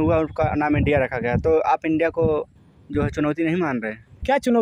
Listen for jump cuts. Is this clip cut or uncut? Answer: uncut